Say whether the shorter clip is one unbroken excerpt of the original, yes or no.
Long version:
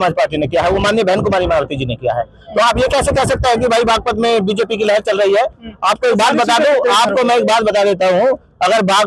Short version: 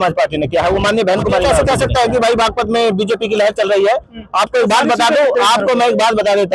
no